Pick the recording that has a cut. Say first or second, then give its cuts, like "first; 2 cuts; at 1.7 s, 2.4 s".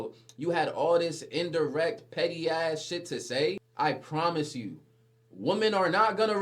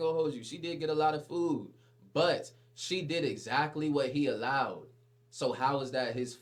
first; 1 cut; at 3.7 s